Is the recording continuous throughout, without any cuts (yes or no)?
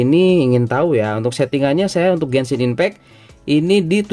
yes